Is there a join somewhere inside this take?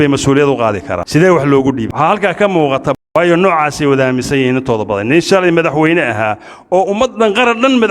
yes; 3 cuts; at 0.9 s, 1.9 s, 3.0 s

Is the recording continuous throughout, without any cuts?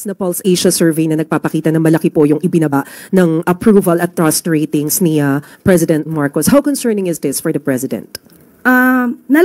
yes; 0 cuts

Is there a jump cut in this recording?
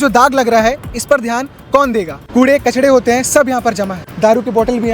yes; 2 cuts; at 2.2 s, 4.0 s

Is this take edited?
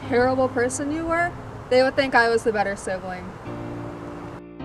yes; 1 cut; at 3.4 s

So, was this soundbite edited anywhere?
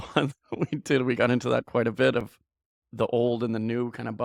no; 0 cuts

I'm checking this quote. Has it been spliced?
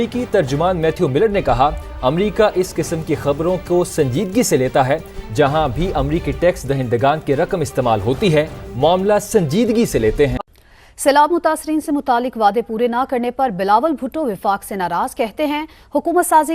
no; 0 cuts

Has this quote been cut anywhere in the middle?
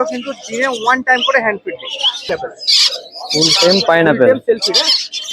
yes; 1 cut; at 2.3 s

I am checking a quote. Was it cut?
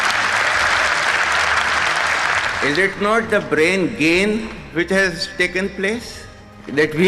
no; 0 cuts

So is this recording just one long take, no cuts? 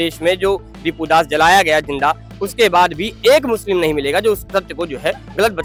yes; 0 cuts

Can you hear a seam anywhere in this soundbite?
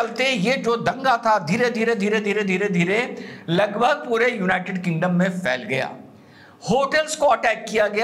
no; 0 cuts

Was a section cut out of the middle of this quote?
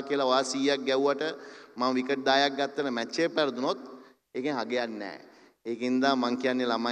no; 0 cuts

